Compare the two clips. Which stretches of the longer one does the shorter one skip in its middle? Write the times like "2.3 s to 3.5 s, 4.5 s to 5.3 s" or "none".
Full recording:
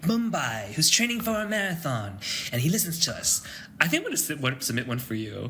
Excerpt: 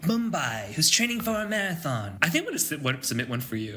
2.1 s to 3.7 s